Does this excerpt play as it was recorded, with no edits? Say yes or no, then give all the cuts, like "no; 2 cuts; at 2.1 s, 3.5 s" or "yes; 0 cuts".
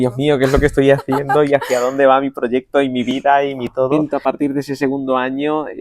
no; 1 cut; at 3.9 s